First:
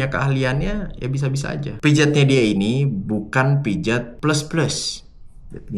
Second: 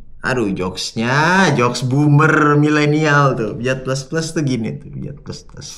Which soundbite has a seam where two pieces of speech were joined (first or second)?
first